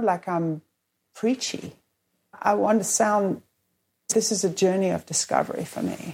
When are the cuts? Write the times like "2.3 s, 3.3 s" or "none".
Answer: 2.4 s, 4.1 s